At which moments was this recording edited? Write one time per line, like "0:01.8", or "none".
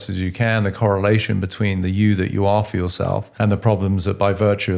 0:03.3